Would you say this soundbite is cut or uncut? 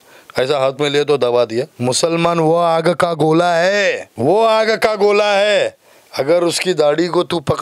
cut